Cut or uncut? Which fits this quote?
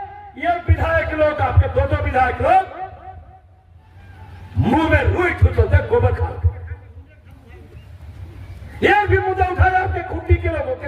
uncut